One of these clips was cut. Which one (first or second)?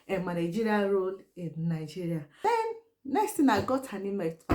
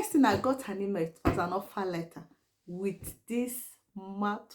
first